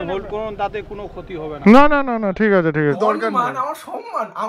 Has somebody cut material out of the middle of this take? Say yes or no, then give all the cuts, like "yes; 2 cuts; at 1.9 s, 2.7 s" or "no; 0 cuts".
yes; 1 cut; at 3.0 s